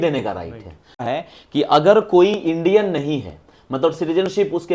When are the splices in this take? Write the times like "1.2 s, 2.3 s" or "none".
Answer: 1.1 s